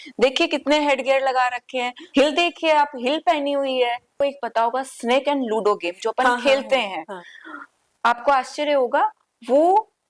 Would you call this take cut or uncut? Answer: cut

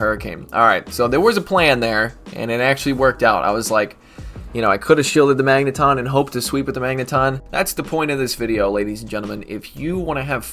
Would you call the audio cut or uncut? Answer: cut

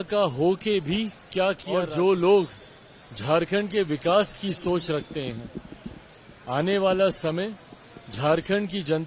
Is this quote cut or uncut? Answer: cut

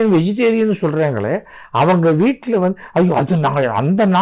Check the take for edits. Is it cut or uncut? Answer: uncut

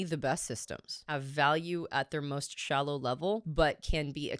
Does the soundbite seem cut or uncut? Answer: cut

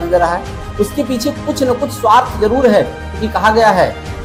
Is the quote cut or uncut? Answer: uncut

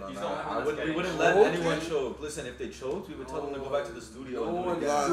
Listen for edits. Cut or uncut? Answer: uncut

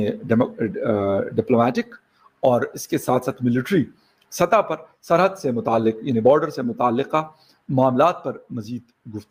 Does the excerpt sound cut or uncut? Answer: uncut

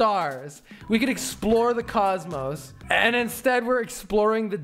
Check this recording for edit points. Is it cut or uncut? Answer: cut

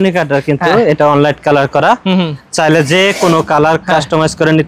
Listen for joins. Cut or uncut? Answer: uncut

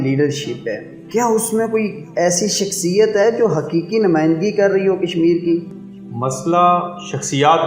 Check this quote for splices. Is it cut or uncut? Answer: cut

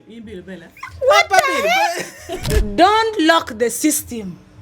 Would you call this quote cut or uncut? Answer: cut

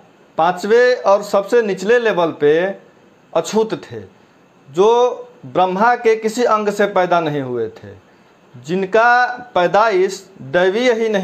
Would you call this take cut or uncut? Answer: uncut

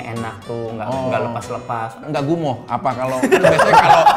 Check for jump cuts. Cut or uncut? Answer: cut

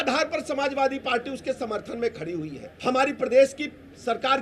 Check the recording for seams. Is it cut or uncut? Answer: cut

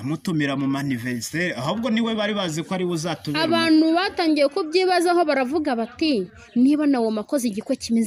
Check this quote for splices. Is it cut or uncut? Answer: uncut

